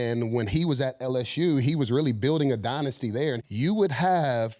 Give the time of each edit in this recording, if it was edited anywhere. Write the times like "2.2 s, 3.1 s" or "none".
3.4 s